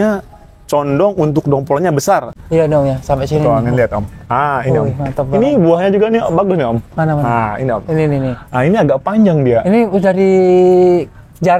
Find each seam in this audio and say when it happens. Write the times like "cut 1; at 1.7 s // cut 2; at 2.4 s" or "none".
cut 1; at 2.3 s